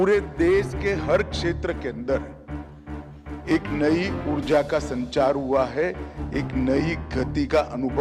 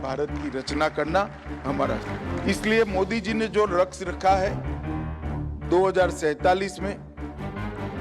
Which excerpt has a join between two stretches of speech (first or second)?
second